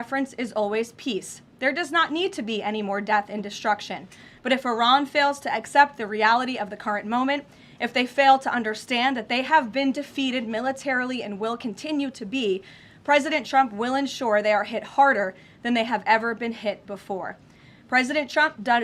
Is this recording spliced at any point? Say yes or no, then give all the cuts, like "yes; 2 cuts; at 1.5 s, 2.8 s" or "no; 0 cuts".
no; 0 cuts